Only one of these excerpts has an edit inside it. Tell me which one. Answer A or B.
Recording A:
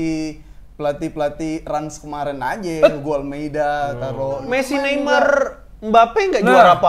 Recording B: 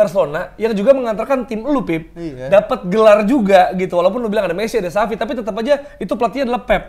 A